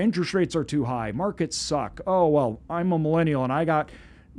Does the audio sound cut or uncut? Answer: uncut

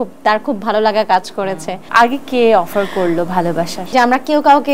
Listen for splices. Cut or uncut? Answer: cut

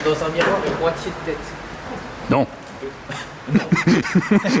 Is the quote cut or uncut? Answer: uncut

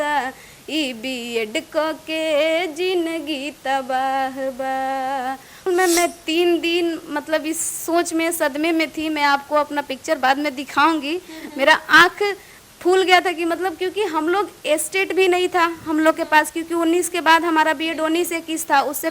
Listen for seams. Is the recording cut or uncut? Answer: cut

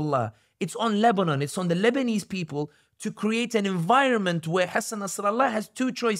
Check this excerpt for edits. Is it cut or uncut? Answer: uncut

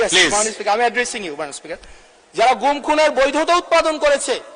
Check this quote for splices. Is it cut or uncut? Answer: uncut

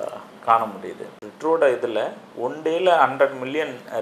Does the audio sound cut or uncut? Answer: cut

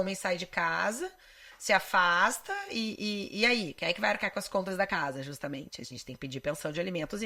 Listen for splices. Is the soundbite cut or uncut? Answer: uncut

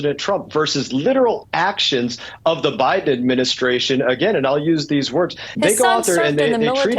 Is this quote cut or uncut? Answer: cut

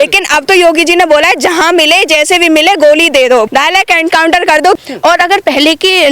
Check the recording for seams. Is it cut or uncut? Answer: cut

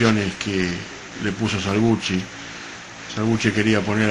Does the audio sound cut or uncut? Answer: uncut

